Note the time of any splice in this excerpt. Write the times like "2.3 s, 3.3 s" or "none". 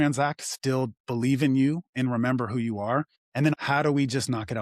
3.5 s

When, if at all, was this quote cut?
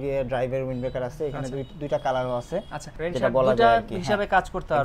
3.0 s

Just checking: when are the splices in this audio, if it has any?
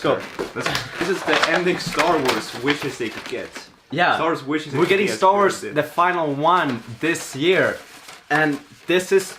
1.0 s

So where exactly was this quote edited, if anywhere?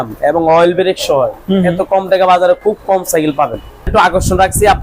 3.9 s

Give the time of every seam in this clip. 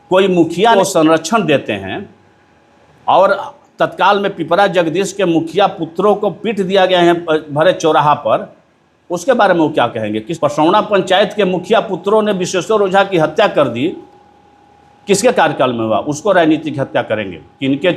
0.8 s, 10.3 s

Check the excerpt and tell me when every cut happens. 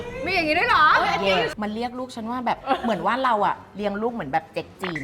1.5 s, 2.6 s

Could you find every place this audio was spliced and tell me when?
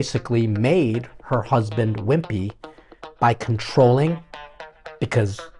none

